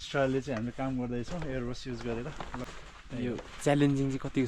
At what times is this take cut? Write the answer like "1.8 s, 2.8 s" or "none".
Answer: 2.6 s